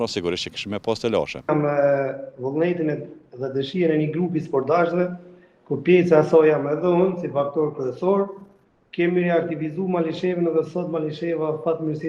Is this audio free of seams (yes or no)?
no